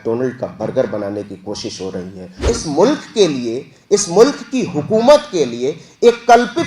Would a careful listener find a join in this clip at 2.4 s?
yes; 1 cut; at 2.4 s

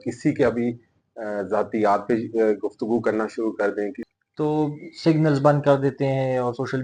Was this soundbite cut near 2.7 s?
no; 1 cut; at 4.1 s

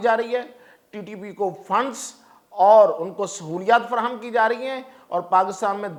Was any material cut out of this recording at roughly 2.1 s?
no; 0 cuts

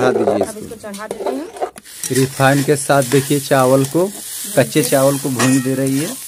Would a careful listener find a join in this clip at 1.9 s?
yes; 1 cut; at 1.9 s

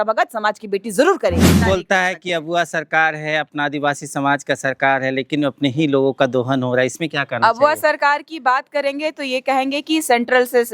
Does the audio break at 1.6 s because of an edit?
yes; 1 cut; at 1.6 s

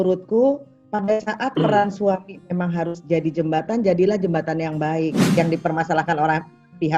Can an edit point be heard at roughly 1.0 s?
no; 1 cut; at 5.3 s

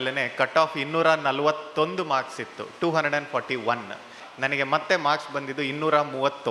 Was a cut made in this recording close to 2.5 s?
no; 1 cut; at 4.2 s

